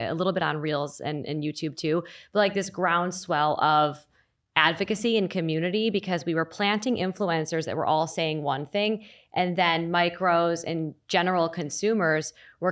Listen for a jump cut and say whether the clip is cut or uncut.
uncut